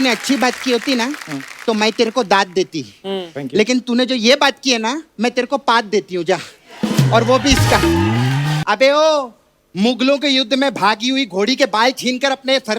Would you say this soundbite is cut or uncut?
cut